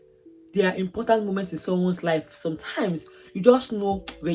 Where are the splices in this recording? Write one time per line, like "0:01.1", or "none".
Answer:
none